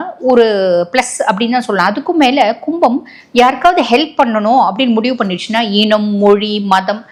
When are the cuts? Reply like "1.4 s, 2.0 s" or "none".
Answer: none